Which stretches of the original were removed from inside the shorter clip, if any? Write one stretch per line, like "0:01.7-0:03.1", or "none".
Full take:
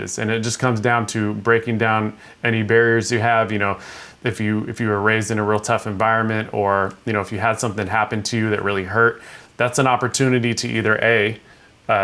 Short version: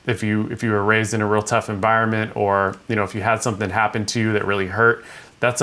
none